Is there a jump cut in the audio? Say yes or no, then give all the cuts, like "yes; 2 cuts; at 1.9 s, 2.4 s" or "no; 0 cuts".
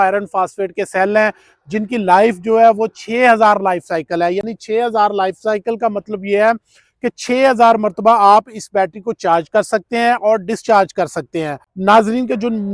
no; 0 cuts